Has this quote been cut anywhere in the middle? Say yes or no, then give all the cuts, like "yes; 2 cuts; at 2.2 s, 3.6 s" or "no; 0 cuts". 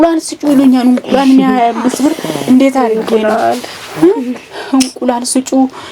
no; 0 cuts